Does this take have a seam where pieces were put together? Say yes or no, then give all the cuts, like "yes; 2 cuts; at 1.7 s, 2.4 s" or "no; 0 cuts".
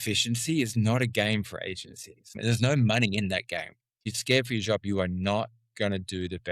yes; 2 cuts; at 2.4 s, 4.1 s